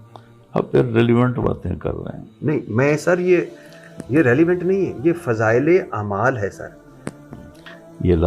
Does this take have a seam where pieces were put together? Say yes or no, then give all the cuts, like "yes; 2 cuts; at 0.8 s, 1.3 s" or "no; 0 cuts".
yes; 1 cut; at 7.2 s